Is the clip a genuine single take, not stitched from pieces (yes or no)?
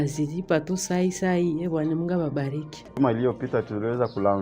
no